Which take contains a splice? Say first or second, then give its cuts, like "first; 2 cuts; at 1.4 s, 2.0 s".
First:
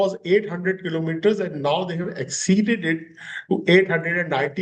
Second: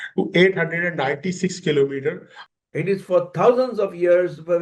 second; 1 cut; at 2.3 s